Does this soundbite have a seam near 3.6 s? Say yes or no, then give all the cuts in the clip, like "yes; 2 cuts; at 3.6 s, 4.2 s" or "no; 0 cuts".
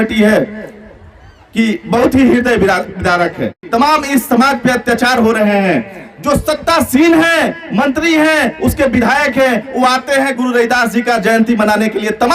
yes; 1 cut; at 3.6 s